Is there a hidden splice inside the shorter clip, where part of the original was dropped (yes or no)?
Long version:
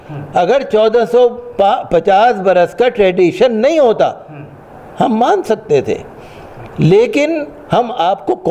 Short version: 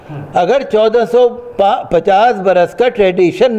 no